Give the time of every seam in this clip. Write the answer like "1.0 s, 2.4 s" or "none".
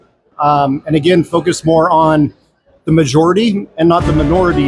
none